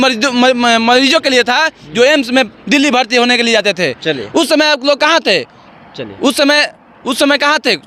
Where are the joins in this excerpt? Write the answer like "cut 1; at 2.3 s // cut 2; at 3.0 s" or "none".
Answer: none